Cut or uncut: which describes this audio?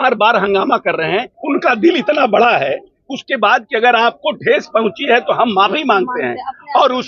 cut